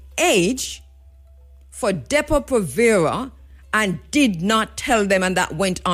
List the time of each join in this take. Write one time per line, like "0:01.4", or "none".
none